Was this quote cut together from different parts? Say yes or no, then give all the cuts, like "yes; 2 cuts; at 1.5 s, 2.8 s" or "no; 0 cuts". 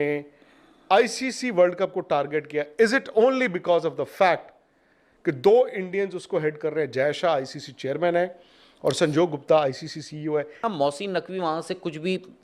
yes; 1 cut; at 10.6 s